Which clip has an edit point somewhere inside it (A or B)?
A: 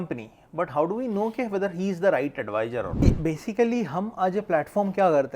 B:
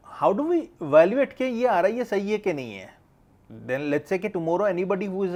A